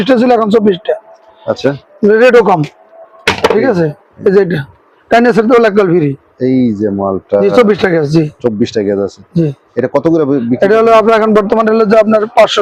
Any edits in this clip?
no; 0 cuts

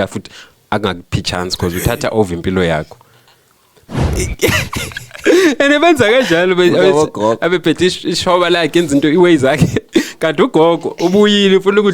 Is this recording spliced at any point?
yes; 1 cut; at 4.2 s

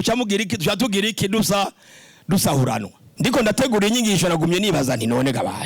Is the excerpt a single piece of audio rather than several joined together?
no; 1 cut; at 3.0 s

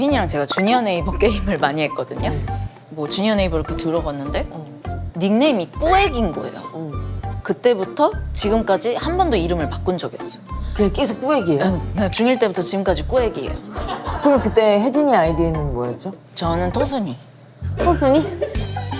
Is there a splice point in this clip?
yes; 1 cut; at 7.2 s

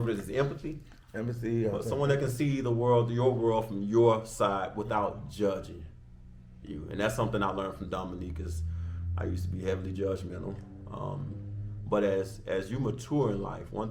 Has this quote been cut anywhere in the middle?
no; 0 cuts

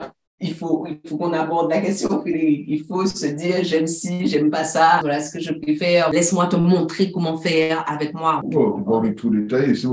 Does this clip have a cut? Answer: yes; 3 cuts; at 5.0 s, 6.1 s, 8.4 s

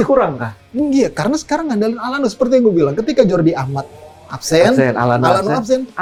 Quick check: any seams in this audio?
no; 0 cuts

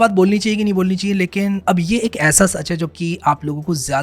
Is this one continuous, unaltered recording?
no; 1 cut; at 1.6 s

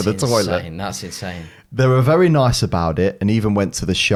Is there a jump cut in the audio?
no; 0 cuts

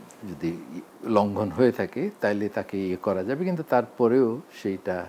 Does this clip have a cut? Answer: yes; 1 cut; at 0.9 s

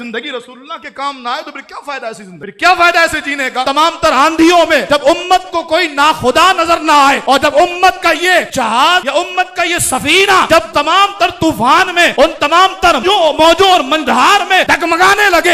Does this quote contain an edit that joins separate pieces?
yes; 1 cut; at 3.6 s

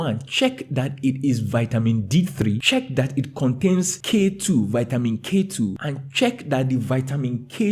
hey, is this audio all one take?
yes; 0 cuts

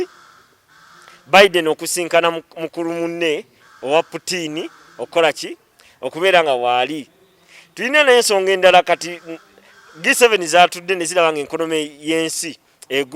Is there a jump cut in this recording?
no; 0 cuts

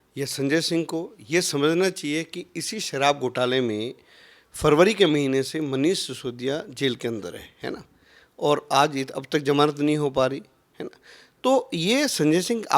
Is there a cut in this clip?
no; 0 cuts

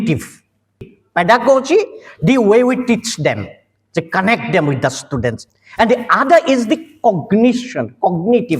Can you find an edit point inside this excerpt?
yes; 2 cuts; at 0.9 s, 5.5 s

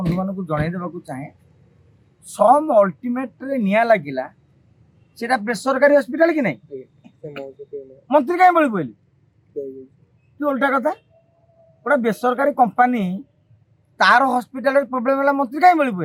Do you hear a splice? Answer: no; 0 cuts

